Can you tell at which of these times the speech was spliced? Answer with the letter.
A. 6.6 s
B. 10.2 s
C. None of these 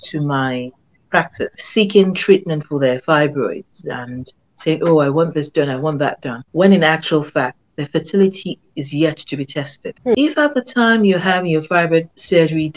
B